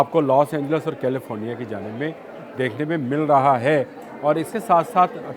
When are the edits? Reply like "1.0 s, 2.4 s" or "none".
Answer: none